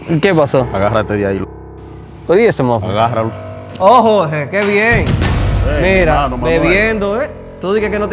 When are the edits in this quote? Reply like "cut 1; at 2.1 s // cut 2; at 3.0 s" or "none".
cut 1; at 3.7 s